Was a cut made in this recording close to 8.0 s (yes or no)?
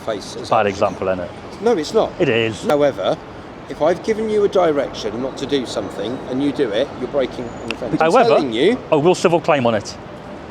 yes